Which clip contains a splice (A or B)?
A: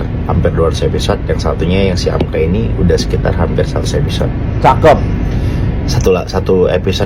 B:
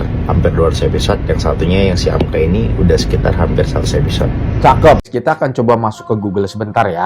B